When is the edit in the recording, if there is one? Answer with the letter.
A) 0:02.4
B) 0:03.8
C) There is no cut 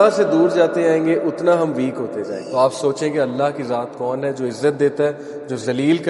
A